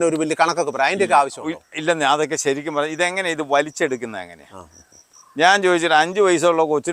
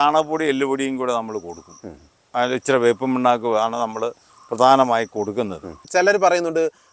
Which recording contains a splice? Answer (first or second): second